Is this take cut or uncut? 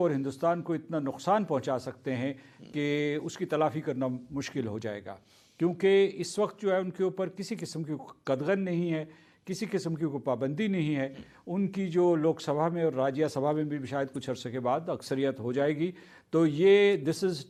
uncut